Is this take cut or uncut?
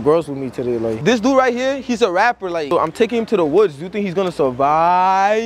cut